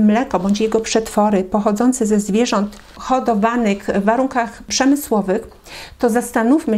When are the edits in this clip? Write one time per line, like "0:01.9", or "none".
none